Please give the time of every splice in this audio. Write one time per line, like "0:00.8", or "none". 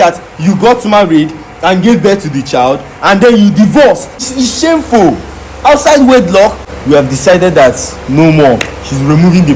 0:04.3
0:06.7